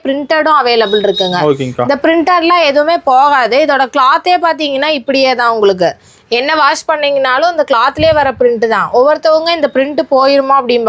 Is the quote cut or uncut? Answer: uncut